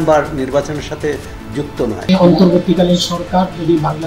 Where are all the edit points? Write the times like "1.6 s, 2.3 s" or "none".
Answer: 2.1 s